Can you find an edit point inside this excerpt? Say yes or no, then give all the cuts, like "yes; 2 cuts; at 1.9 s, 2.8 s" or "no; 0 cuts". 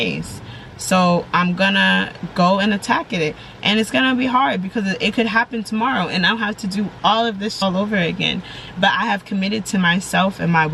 yes; 1 cut; at 7.6 s